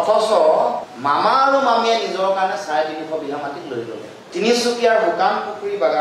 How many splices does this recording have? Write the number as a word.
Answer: zero